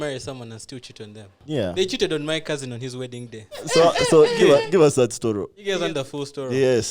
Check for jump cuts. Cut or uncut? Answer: cut